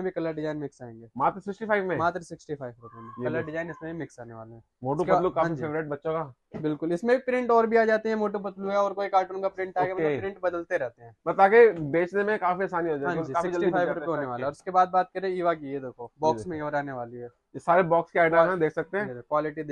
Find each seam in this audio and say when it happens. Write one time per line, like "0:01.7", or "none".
none